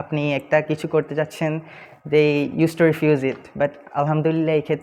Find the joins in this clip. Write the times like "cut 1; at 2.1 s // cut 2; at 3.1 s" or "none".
none